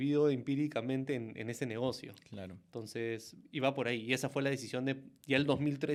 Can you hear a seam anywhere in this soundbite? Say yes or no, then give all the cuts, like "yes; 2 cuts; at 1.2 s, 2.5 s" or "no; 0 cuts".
no; 0 cuts